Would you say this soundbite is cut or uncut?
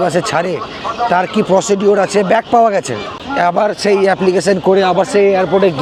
uncut